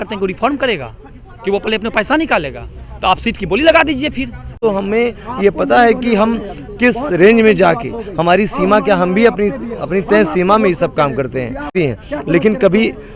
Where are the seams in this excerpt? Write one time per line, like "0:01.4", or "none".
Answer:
0:04.5
0:11.7

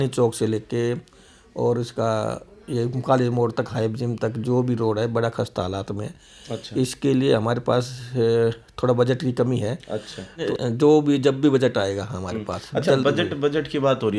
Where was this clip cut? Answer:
0:10.5

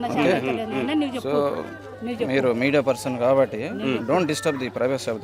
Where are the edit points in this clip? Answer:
none

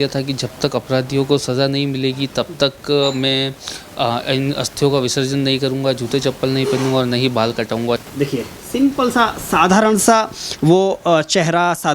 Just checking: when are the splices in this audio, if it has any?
0:08.0

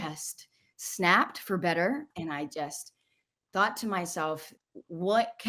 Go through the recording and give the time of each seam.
0:02.1
0:04.6

